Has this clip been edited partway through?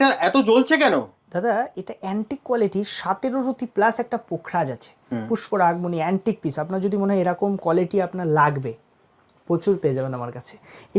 no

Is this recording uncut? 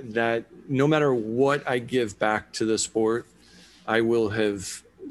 yes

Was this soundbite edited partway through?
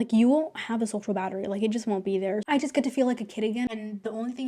yes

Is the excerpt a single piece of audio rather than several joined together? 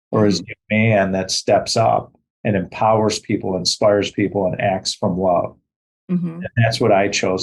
yes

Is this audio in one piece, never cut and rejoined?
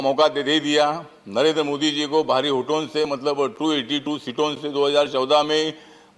yes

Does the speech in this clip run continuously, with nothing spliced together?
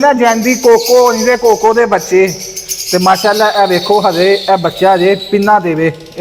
yes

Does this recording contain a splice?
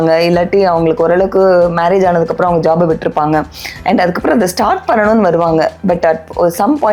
no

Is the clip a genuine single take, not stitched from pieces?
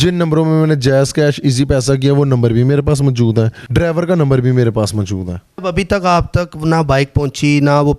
no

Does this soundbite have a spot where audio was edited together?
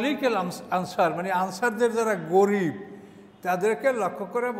no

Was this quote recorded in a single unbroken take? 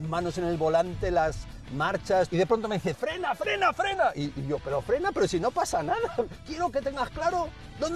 no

